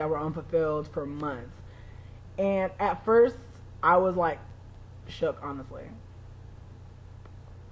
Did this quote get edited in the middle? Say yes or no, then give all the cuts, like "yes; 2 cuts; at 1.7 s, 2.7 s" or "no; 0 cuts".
yes; 1 cut; at 1.5 s